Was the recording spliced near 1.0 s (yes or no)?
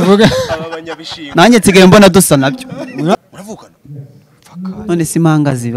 no